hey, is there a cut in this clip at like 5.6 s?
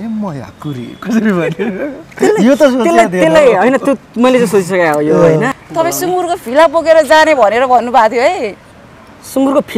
yes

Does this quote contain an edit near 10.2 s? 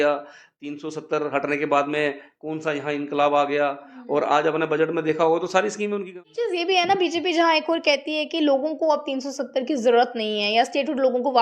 no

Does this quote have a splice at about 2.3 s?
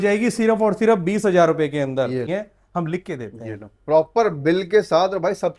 yes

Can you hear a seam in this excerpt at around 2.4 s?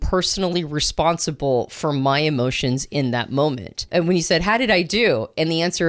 no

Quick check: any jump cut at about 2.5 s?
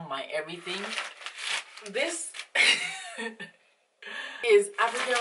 no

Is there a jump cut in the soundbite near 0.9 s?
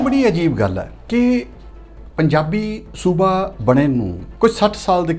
yes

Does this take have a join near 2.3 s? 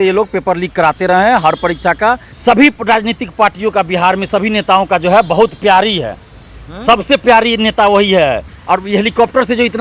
yes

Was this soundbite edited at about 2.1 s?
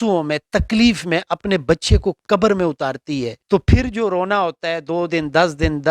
no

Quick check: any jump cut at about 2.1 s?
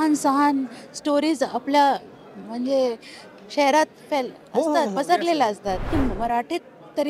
no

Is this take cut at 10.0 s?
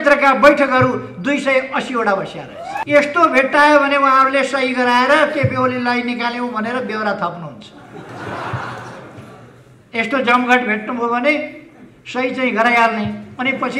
no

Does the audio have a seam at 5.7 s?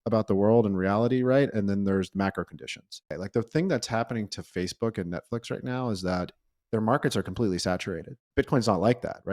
no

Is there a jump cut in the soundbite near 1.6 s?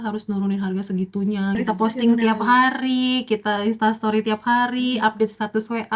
yes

